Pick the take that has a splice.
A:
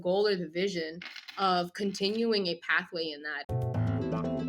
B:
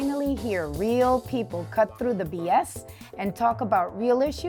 A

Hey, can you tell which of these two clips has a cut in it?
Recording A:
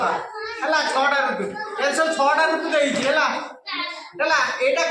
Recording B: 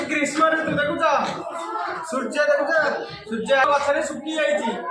B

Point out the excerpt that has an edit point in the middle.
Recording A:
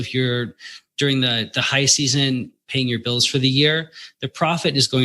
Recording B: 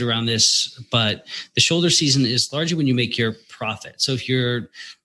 A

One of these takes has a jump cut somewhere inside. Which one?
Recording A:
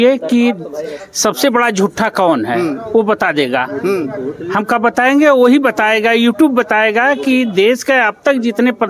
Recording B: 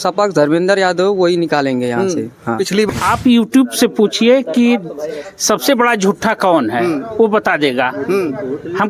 B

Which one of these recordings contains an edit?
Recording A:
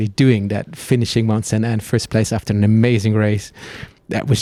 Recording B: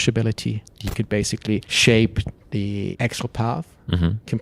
B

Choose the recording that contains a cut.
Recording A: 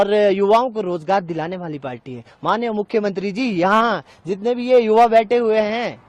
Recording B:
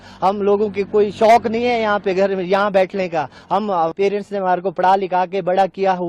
B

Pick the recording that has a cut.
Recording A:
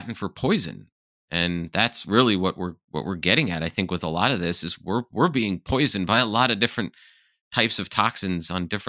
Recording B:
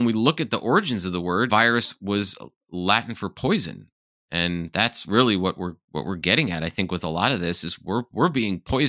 B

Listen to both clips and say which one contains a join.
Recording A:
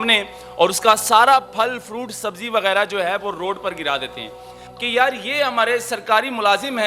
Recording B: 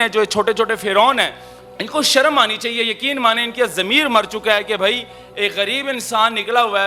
A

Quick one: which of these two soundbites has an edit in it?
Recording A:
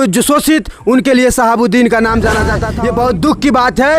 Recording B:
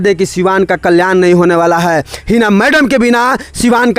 A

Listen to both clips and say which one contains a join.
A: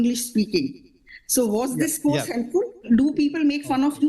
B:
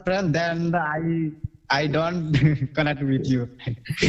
A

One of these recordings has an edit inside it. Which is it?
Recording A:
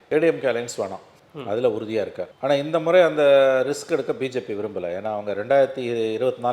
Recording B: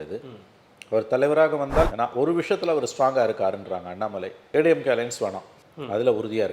B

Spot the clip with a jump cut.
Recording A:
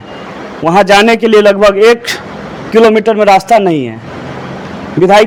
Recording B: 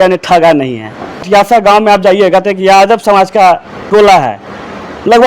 B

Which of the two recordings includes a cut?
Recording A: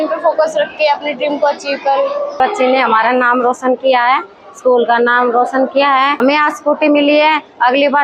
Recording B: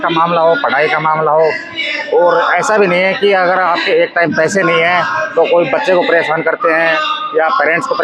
A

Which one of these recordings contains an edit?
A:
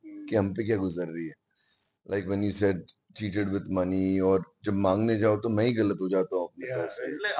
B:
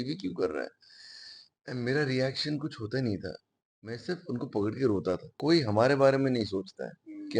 B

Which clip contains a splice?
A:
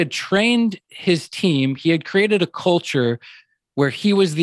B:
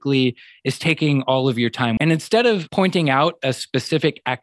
B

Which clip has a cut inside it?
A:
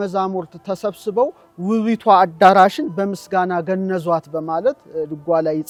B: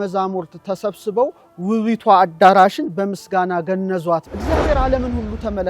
B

